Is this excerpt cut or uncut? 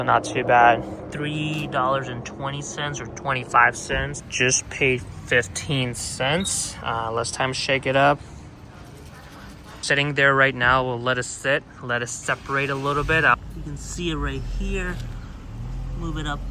cut